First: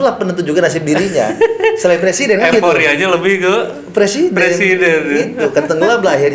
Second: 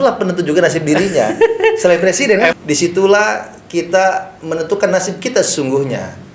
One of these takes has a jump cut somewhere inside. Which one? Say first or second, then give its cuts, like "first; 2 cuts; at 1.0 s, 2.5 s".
second; 1 cut; at 2.5 s